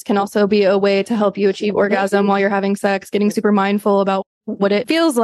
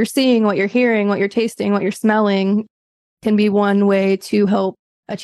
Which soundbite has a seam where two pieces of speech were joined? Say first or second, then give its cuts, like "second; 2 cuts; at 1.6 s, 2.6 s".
first; 1 cut; at 4.2 s